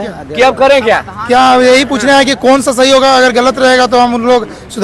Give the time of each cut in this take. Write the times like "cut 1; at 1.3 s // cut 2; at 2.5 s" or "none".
none

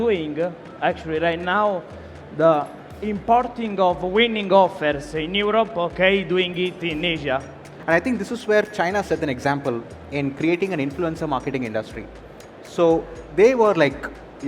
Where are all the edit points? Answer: cut 1; at 7.7 s

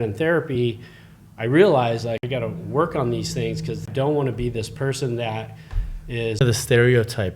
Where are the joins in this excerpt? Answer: cut 1; at 2.2 s // cut 2; at 3.8 s // cut 3; at 6.4 s

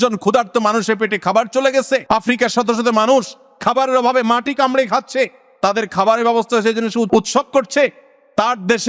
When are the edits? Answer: cut 1; at 2.0 s // cut 2; at 7.1 s

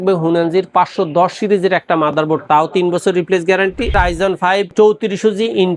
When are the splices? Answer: cut 1; at 3.9 s

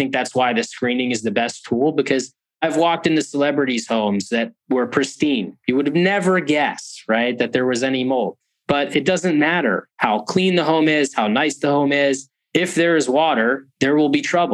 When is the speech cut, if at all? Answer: none

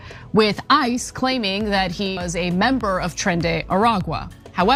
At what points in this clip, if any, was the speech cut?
none

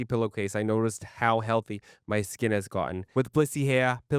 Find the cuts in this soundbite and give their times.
cut 1; at 3.0 s

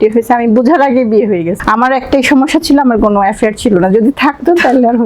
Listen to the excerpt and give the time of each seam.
cut 1; at 1.5 s

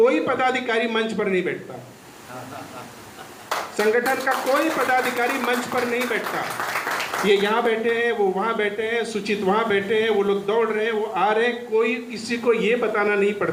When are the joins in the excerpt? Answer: none

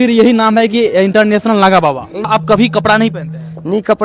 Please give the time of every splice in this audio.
cut 1; at 2.2 s

